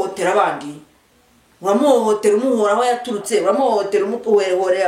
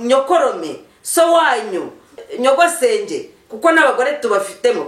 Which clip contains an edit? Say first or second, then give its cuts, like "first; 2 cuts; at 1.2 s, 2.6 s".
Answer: second; 1 cut; at 2.3 s